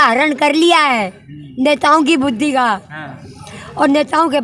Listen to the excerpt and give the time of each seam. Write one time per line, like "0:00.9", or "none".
none